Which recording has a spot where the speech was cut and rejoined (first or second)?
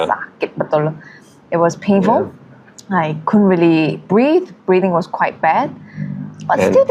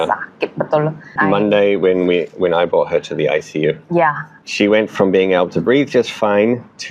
second